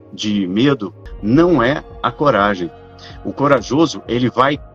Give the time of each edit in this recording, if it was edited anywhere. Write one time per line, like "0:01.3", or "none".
0:01.0